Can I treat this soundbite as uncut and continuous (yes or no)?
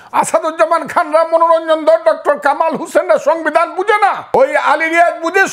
no